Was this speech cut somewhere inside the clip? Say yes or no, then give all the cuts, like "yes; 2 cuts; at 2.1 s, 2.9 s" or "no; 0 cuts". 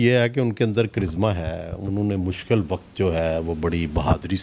no; 0 cuts